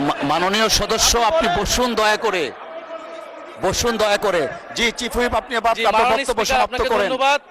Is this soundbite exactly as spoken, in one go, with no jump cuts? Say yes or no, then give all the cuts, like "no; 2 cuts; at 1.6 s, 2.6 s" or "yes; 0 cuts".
yes; 0 cuts